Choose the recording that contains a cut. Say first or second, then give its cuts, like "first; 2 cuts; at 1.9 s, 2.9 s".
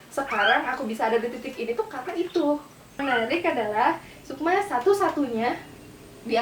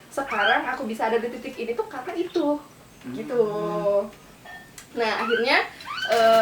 first; 1 cut; at 3.0 s